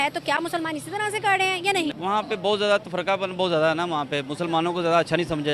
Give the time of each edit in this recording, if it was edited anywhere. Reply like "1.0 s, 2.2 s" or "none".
1.9 s